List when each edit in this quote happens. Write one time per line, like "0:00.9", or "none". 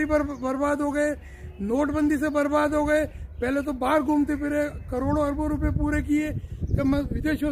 none